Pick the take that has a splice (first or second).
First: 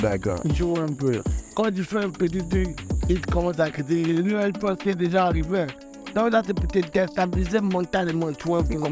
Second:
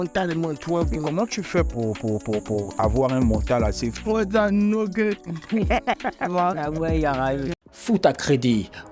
second